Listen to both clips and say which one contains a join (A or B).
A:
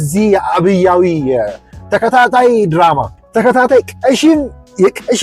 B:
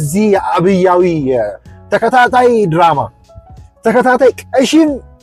A